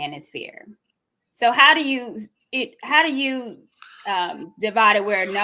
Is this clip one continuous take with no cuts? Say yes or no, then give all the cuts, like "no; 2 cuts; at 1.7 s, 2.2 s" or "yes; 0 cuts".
yes; 0 cuts